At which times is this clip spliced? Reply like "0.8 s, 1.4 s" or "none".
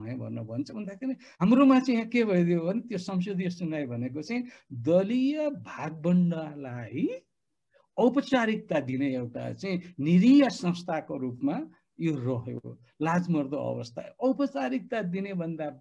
1.3 s

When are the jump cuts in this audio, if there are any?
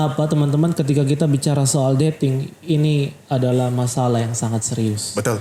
none

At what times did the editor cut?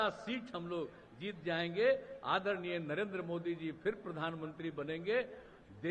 none

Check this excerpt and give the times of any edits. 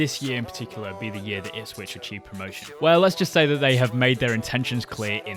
none

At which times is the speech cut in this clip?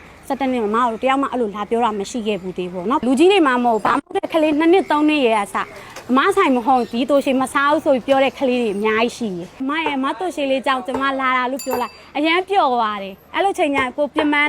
3.0 s, 9.6 s

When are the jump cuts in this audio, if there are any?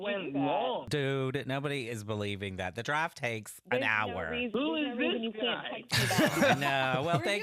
0.9 s, 4.5 s

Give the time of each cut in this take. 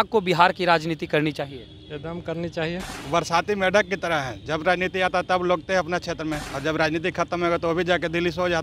3.0 s, 6.5 s

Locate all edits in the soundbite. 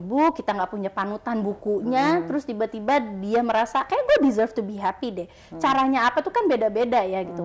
none

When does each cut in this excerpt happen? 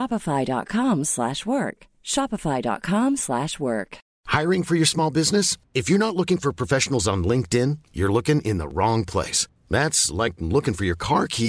4.0 s

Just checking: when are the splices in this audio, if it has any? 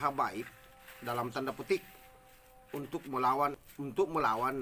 3.6 s

